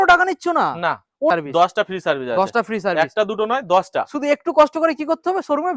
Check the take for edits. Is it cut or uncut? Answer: cut